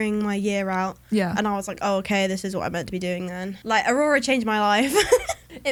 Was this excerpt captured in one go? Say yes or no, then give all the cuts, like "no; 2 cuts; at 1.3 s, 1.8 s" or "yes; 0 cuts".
yes; 0 cuts